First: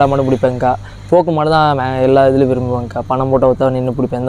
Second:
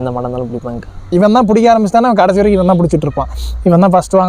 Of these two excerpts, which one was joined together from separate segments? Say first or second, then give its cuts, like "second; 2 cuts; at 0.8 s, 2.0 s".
second; 1 cut; at 1.1 s